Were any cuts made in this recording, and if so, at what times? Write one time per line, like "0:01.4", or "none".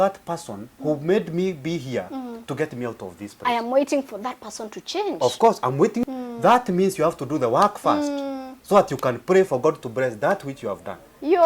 0:06.1

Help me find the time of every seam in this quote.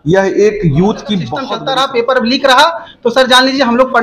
0:01.4

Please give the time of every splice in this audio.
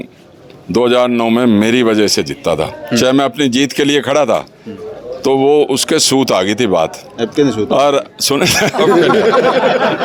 none

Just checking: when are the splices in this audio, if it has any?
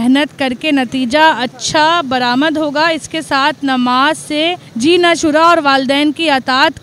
0:04.6

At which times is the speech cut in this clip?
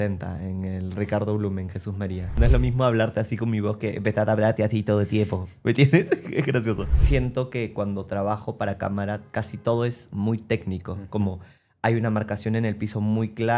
0:02.3
0:06.9

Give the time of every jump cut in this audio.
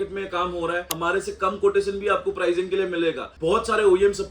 0:00.9
0:03.3

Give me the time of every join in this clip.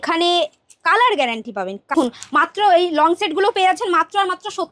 0:01.9

